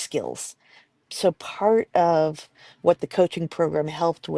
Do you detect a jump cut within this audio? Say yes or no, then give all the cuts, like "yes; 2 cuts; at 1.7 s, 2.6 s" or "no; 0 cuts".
yes; 1 cut; at 1.0 s